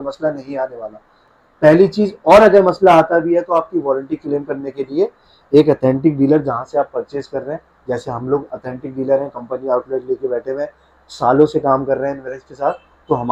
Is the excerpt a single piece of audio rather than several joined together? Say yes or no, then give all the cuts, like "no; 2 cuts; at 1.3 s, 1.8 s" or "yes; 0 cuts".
yes; 0 cuts